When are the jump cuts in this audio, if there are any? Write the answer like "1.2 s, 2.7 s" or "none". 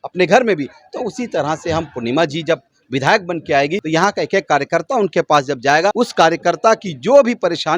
3.8 s, 5.9 s